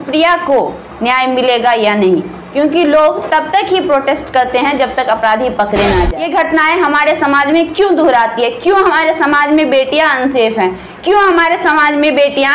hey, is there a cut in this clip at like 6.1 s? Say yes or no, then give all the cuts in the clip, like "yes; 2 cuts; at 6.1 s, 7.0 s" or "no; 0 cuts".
yes; 1 cut; at 6.1 s